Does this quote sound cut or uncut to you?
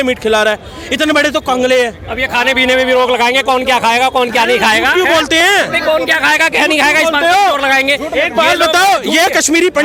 uncut